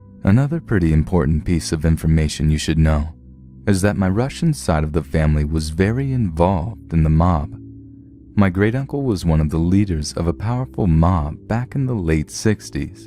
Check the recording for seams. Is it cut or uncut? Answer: cut